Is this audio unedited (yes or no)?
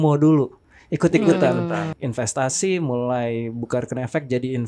no